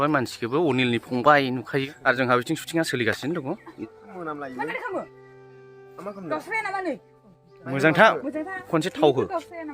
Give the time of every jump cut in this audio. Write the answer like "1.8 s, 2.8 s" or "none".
1.9 s, 3.7 s